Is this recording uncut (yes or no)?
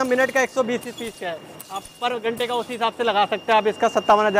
yes